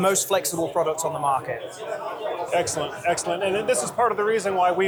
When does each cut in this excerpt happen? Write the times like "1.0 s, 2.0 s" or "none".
none